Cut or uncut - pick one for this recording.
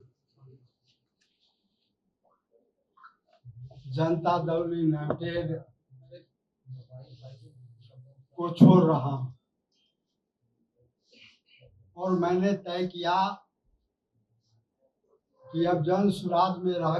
uncut